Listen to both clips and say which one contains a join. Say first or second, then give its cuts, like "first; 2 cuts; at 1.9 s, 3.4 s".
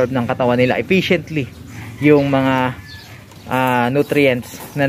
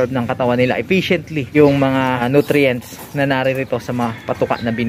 second; 2 cuts; at 1.5 s, 2.2 s